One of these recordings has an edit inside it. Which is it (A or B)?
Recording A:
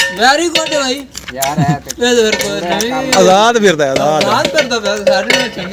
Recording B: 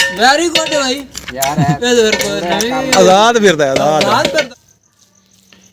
B